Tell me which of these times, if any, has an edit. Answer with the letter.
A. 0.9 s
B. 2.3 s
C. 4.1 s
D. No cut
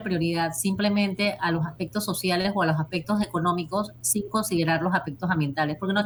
D